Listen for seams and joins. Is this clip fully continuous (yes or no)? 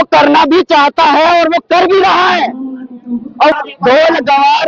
no